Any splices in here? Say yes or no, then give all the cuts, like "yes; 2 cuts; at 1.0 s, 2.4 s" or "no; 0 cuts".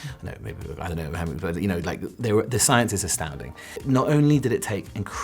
yes; 1 cut; at 3.7 s